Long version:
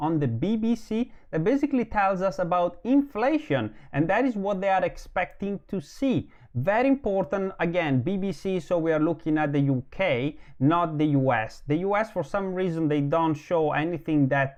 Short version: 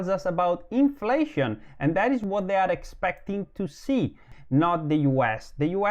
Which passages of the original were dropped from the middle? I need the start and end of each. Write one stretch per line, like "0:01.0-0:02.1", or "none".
0:06.5-0:10.4